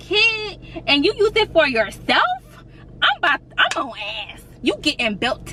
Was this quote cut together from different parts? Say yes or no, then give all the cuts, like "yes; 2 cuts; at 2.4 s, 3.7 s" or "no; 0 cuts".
no; 0 cuts